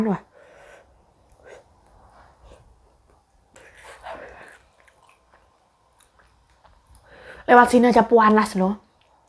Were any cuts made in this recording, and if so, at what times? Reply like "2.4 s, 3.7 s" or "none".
3.5 s